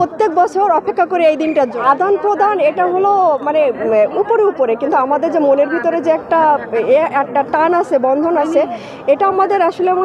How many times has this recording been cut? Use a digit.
1